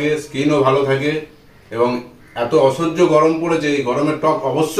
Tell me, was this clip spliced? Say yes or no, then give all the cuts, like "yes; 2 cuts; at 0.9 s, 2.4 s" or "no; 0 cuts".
no; 0 cuts